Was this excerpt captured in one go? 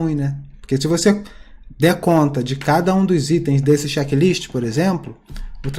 yes; 0 cuts

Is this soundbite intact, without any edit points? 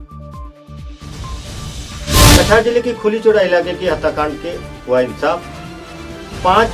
no; 1 cut; at 2.1 s

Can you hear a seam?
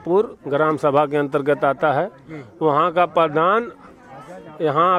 no; 0 cuts

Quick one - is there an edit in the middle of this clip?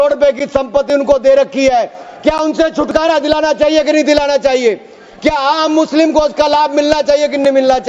no; 0 cuts

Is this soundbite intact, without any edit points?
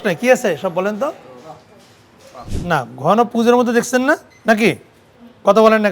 no; 2 cuts; at 2.5 s, 4.3 s

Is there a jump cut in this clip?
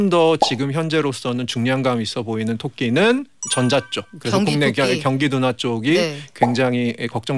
no; 0 cuts

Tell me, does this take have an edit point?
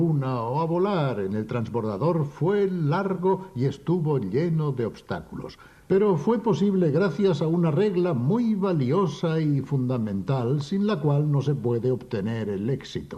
yes; 1 cut; at 8.6 s

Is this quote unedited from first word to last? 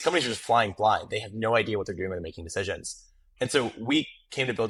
yes; 0 cuts

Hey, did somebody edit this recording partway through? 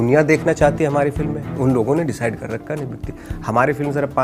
yes; 1 cut; at 1.4 s

